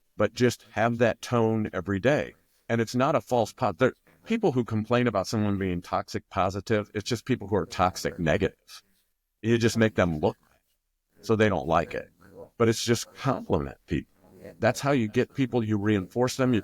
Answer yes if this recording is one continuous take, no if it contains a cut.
yes